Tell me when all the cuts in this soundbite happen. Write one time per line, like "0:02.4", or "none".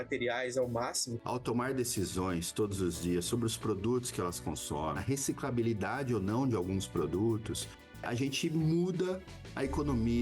0:01.1
0:05.0
0:08.0